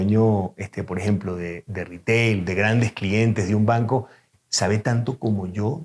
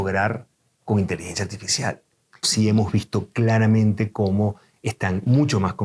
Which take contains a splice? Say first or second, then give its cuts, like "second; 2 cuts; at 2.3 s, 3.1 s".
second; 1 cut; at 2.5 s